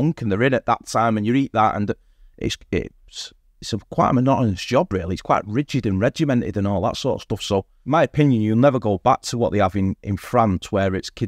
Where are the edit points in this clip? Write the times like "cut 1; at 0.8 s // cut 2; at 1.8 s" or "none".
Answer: cut 1; at 7.8 s